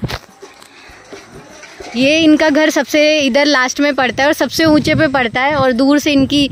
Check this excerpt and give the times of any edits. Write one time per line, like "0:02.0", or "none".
0:01.8